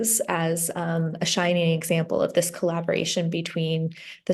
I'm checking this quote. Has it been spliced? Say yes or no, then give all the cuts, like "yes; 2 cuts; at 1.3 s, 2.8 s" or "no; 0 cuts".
no; 0 cuts